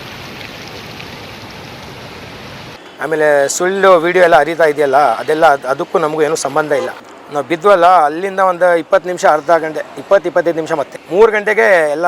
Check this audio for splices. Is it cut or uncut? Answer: cut